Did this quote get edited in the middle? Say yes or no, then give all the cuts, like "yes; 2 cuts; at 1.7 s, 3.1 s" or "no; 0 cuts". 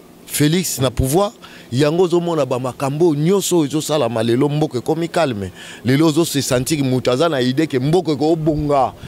no; 0 cuts